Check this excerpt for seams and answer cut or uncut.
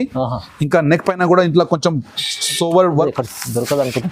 cut